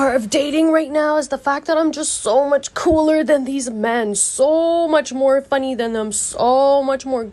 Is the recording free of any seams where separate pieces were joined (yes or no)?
yes